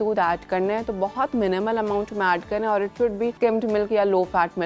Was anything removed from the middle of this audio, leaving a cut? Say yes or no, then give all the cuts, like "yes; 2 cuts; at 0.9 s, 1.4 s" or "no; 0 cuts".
yes; 1 cut; at 3.3 s